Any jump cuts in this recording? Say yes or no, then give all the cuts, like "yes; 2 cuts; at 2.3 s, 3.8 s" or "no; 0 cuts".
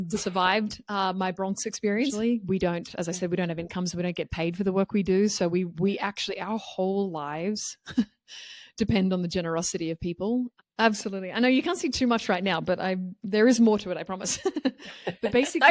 yes; 2 cuts; at 2.1 s, 10.6 s